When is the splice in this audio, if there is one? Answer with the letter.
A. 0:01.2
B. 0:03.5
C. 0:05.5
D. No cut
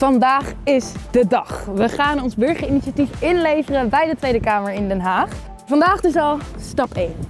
C